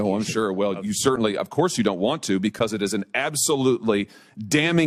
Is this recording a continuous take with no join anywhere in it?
yes; 0 cuts

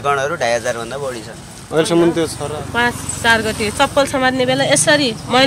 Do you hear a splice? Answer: yes; 1 cut; at 2.4 s

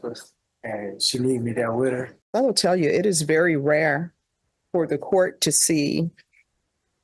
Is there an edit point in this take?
yes; 1 cut; at 2.2 s

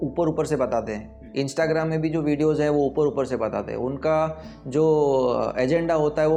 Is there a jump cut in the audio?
no; 0 cuts

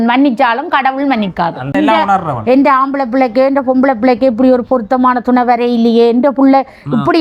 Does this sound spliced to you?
yes; 1 cut; at 1.7 s

